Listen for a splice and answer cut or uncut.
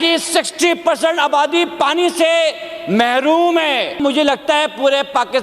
cut